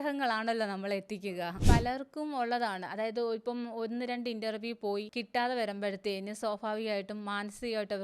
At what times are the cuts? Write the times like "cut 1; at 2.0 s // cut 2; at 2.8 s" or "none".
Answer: cut 1; at 1.6 s // cut 2; at 5.2 s